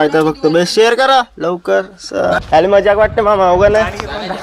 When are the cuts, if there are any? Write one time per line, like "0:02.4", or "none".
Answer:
0:02.4